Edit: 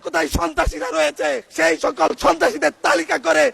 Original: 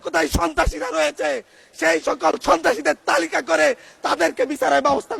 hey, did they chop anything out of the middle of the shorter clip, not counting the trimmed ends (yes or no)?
yes